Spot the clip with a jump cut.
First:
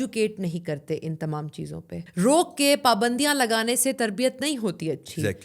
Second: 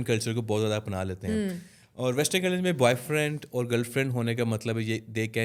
first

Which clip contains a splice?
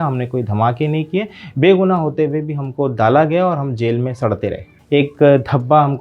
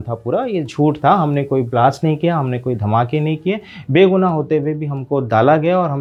first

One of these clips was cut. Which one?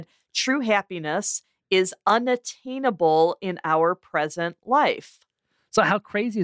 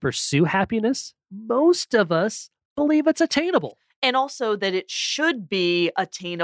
second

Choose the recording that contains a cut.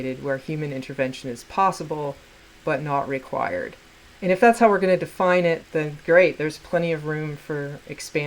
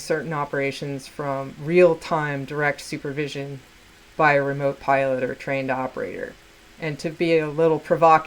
first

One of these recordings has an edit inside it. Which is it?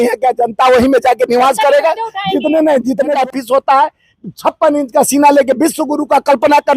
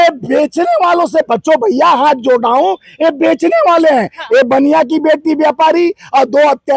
first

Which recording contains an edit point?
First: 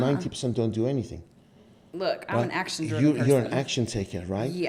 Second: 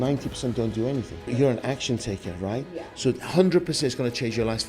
second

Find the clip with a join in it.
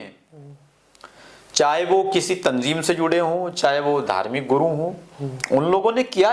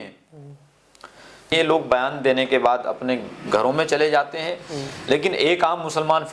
second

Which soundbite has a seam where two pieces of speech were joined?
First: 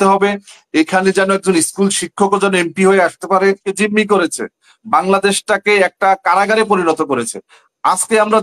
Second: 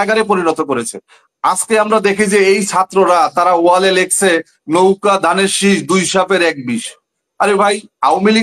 first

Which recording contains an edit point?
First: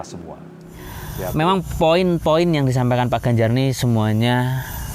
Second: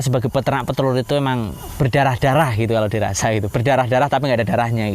first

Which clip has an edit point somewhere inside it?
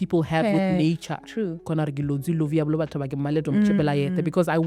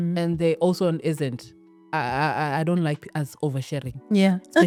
first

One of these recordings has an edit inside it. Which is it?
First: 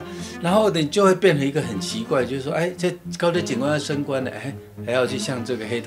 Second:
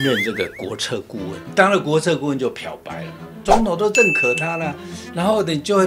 second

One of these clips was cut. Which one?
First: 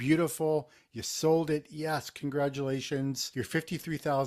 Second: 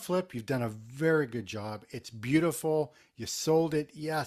first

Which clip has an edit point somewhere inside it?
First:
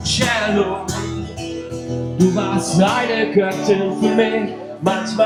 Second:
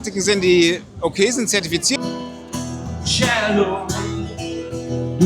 second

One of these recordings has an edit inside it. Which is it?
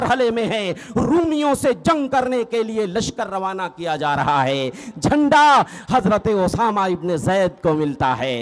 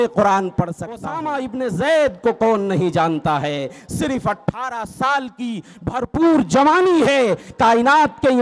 second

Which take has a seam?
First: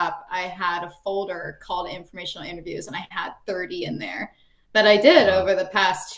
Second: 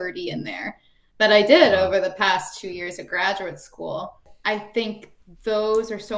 second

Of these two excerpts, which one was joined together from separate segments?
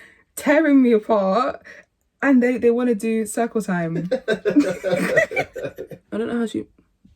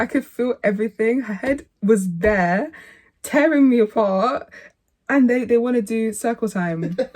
first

